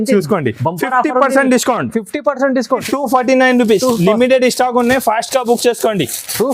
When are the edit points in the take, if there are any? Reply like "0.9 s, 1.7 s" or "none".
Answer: 2.8 s